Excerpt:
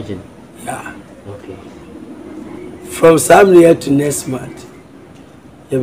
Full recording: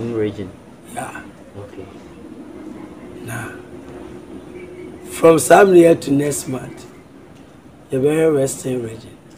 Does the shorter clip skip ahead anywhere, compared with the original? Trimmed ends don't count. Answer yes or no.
yes